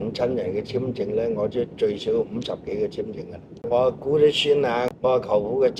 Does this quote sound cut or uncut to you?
cut